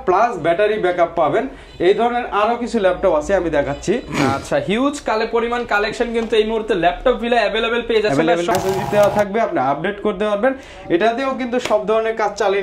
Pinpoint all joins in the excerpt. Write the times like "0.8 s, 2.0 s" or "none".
8.5 s